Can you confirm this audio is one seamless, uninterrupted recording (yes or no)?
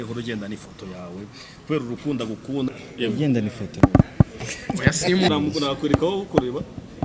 no